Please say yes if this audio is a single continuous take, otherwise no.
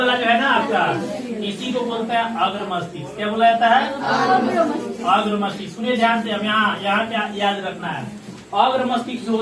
yes